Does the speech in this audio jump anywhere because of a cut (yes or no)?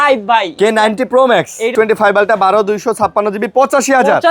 yes